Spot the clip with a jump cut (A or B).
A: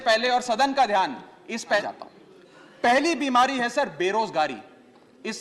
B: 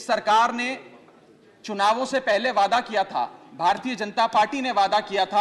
A